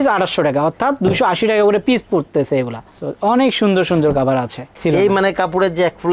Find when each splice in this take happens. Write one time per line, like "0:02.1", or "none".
0:04.7